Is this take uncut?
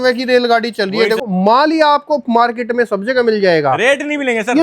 no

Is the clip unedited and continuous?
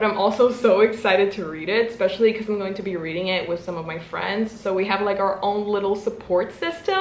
yes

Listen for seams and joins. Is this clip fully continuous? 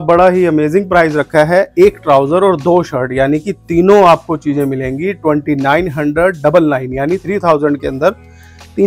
yes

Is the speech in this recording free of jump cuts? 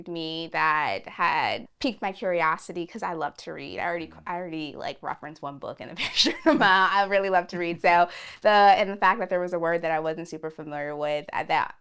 no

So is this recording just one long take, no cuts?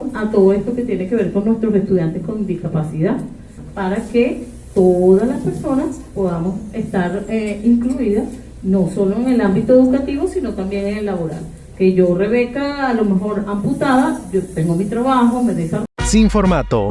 no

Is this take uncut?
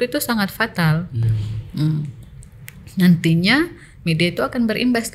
yes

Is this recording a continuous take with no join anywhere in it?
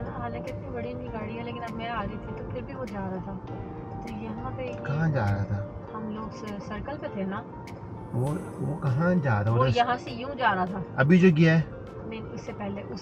yes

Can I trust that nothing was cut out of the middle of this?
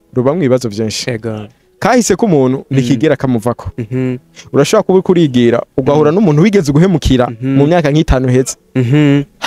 yes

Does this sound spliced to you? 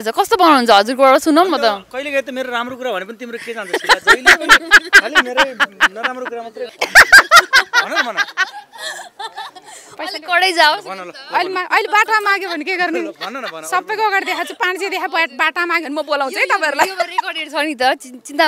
yes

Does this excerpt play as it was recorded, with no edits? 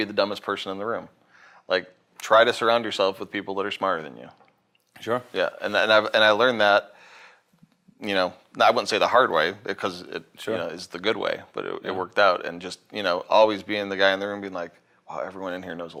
yes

